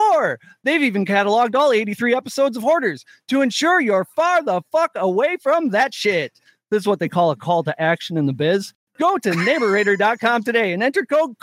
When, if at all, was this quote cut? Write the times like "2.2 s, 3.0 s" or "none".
8.8 s